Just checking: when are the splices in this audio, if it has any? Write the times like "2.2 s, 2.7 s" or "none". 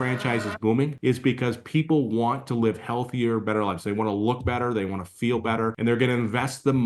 0.9 s, 5.8 s